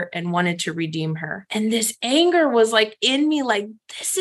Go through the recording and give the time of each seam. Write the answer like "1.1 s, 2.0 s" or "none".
1.3 s